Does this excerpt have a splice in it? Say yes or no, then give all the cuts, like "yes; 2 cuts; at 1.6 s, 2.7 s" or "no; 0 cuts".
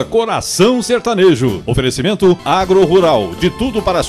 no; 0 cuts